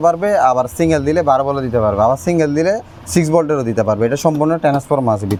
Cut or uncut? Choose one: uncut